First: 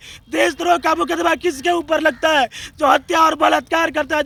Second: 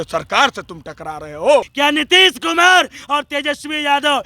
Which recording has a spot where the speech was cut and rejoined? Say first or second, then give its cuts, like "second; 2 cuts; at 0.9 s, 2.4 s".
second; 1 cut; at 1.7 s